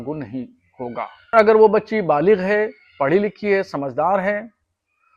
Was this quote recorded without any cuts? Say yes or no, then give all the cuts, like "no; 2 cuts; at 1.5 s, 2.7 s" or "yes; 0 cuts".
no; 1 cut; at 1.3 s